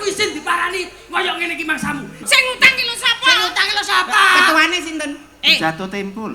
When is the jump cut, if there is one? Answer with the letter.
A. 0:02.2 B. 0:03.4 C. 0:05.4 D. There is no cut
A